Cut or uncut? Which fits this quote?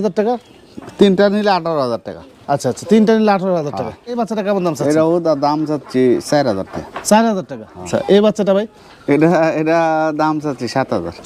cut